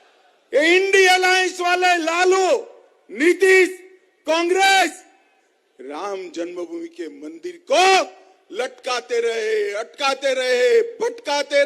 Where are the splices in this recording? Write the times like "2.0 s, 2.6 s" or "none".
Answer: none